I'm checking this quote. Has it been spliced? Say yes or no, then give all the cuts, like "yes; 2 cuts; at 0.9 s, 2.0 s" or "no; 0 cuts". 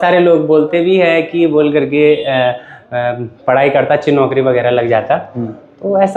no; 0 cuts